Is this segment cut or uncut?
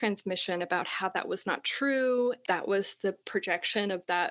cut